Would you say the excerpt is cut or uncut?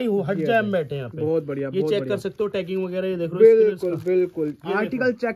uncut